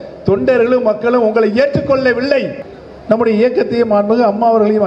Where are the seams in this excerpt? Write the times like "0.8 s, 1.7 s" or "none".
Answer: 2.6 s